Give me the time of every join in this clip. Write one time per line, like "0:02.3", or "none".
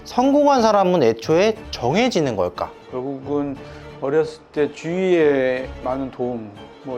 0:02.8